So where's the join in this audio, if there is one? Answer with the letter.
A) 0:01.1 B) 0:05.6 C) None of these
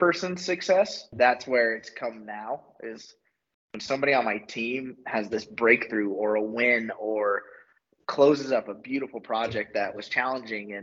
A